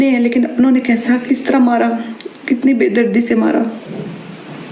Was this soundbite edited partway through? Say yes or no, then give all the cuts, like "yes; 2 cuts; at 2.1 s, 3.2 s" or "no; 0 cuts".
no; 0 cuts